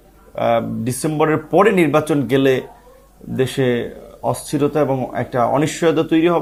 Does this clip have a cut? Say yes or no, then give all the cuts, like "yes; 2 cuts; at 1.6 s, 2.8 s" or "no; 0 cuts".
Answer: no; 0 cuts